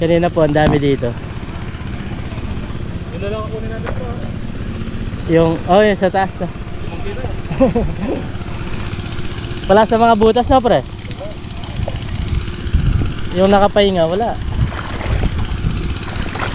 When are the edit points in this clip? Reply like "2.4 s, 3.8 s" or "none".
none